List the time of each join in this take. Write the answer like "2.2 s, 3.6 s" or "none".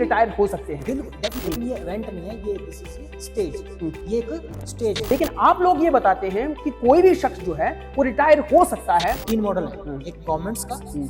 1.4 s, 5.1 s, 9.2 s